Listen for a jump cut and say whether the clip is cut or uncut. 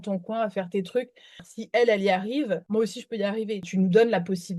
cut